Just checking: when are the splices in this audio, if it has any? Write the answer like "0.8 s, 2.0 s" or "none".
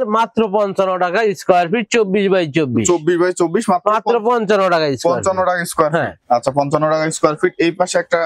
none